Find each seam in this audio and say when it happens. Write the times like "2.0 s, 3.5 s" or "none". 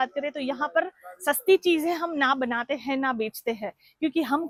none